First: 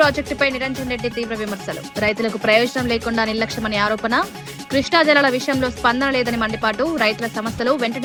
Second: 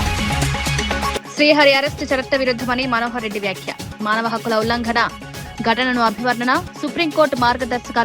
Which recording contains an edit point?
second; 1 cut; at 1.1 s

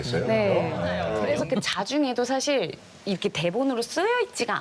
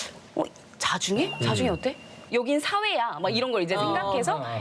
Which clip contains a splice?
first; 1 cut; at 1.1 s

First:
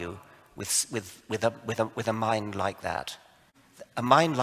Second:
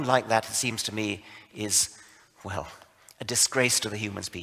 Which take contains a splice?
first; 1 cut; at 3.4 s

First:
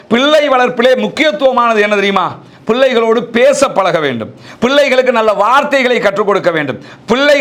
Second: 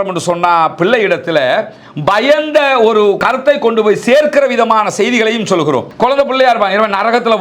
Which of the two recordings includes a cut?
second; 2 cuts; at 3.2 s, 5.9 s

